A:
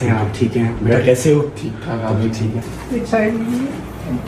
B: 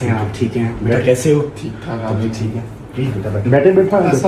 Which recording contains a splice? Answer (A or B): A